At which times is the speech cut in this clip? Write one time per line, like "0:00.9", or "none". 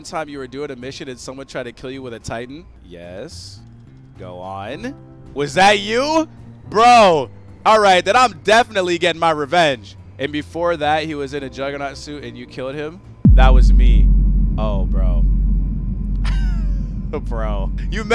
none